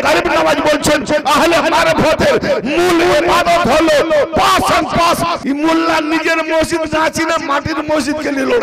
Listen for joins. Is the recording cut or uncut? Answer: cut